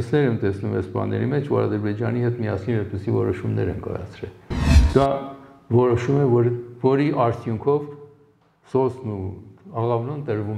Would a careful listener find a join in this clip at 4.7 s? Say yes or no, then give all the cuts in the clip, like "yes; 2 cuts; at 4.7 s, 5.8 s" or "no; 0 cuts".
yes; 1 cut; at 4.7 s